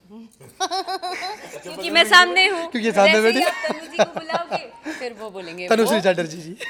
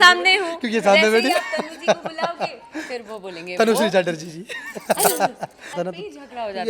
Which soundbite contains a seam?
second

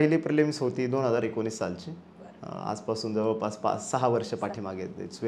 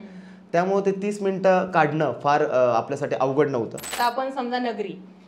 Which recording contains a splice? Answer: second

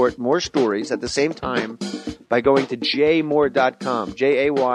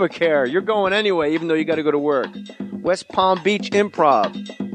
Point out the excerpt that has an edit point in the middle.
first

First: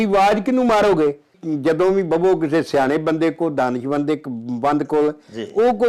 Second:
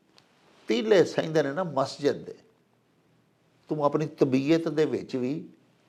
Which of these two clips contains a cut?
first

